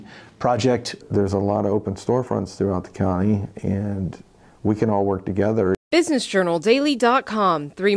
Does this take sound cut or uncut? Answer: cut